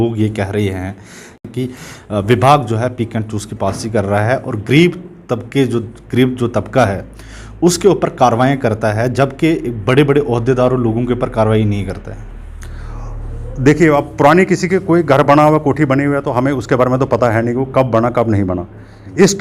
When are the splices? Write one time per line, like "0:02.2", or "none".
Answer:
0:01.4